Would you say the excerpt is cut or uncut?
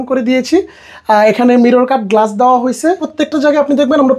uncut